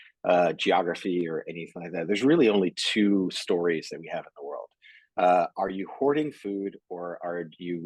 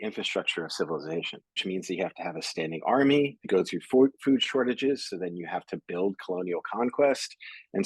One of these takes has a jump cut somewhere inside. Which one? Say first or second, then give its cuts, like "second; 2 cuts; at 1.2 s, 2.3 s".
second; 2 cuts; at 1.6 s, 3.4 s